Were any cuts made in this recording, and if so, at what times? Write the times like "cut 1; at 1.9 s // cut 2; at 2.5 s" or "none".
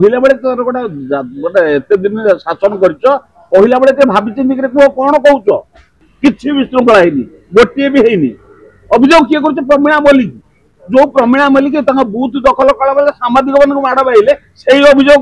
cut 1; at 6.0 s